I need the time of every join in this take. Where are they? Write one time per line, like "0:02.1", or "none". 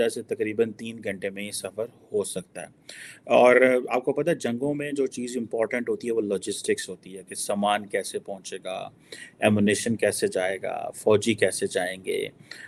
none